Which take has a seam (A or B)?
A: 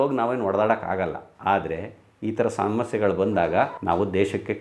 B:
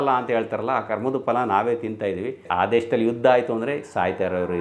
B